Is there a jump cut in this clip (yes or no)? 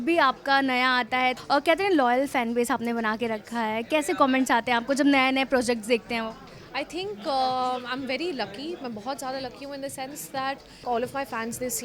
yes